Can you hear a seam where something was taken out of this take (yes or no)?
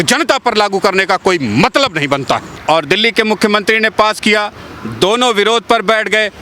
yes